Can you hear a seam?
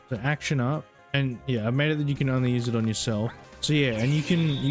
yes; 2 cuts; at 1.0 s, 3.5 s

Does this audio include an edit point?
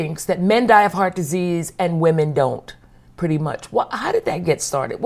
no; 0 cuts

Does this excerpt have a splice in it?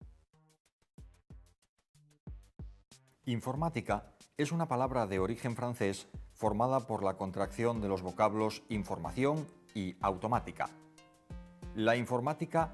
no; 0 cuts

